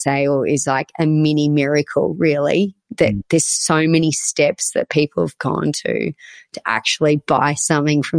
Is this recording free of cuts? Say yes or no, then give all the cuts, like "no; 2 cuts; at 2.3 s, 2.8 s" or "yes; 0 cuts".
yes; 0 cuts